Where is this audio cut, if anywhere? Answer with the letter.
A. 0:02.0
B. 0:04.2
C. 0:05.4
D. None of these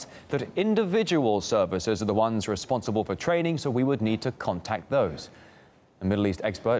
C